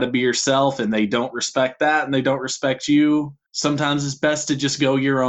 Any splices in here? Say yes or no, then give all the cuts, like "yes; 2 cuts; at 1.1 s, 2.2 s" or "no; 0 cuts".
yes; 1 cut; at 3.4 s